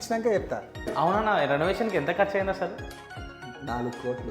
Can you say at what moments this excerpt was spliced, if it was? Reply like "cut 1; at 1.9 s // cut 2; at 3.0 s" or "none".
cut 1; at 0.9 s